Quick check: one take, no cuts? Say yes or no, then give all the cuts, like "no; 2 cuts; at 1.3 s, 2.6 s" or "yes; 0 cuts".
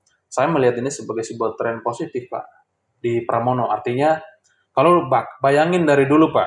yes; 0 cuts